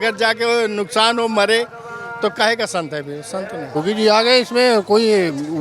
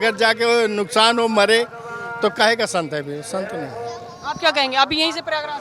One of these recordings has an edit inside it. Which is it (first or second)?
first